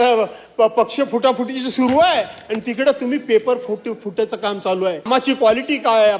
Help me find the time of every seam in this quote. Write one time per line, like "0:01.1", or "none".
0:05.1